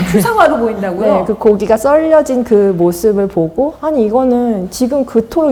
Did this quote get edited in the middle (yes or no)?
no